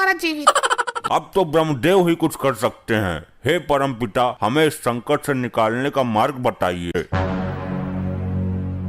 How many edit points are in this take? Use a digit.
2